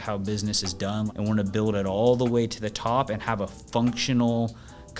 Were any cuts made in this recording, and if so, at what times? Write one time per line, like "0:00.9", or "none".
0:01.1